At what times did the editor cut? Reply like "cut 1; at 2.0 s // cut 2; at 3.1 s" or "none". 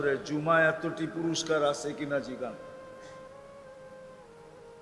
cut 1; at 2.6 s